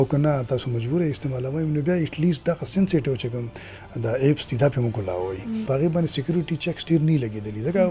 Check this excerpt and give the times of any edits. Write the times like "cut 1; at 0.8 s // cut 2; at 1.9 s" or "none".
cut 1; at 5.6 s